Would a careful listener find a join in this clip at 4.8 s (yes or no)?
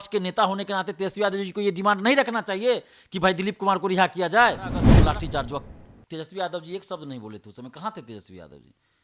yes